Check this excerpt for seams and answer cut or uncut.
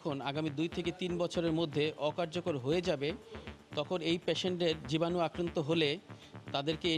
uncut